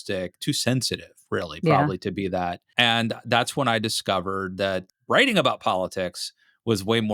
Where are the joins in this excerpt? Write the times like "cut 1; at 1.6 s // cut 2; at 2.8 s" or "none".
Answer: cut 1; at 2.7 s // cut 2; at 4.9 s